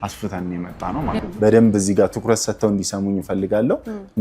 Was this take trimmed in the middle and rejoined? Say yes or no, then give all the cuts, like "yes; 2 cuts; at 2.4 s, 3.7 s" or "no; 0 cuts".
yes; 1 cut; at 1.2 s